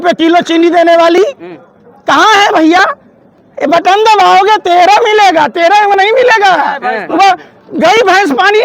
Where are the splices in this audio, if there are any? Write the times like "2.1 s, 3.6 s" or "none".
none

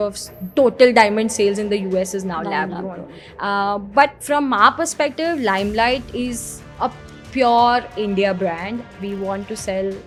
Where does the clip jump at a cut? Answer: none

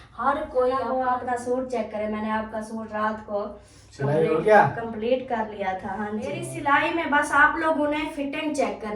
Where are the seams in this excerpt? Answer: 1.0 s, 6.5 s

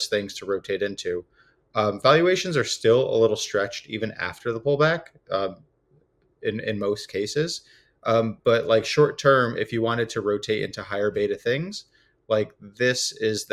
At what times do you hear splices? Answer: none

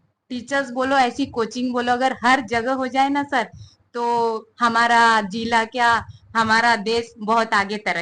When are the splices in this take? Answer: none

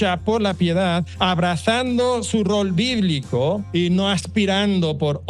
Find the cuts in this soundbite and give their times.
1.1 s, 3.6 s

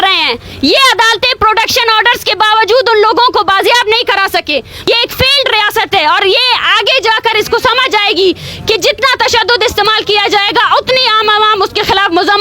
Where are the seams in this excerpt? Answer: 4.9 s

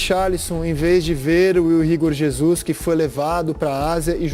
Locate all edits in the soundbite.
none

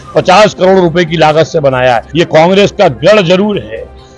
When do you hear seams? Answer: 2.1 s

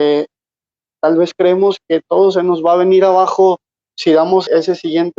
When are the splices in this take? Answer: 1.8 s, 4.5 s

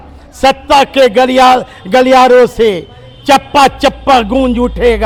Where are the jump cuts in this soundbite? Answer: none

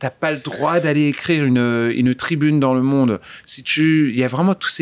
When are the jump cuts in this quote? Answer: none

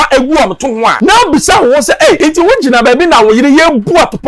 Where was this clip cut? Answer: 0.9 s, 2.2 s

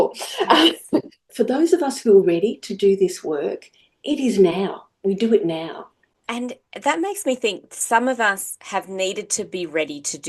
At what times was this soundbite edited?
1.2 s

